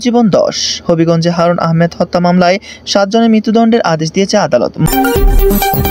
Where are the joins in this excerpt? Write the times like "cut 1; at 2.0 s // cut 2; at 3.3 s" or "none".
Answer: cut 1; at 4.8 s